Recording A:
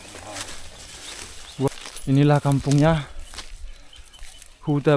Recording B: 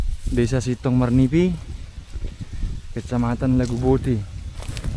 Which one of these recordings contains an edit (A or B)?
A